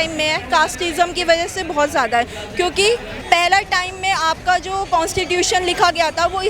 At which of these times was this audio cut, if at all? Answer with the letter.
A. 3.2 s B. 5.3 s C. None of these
A